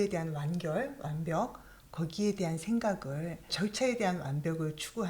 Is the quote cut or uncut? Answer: cut